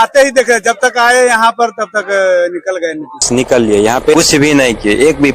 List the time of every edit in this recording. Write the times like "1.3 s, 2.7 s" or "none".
3.2 s